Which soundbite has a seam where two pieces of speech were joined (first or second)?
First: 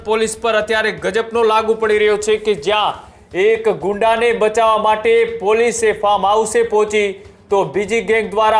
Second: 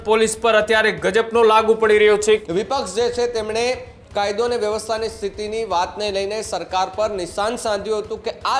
second